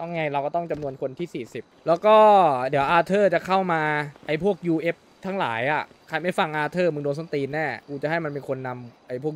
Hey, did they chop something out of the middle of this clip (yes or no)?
yes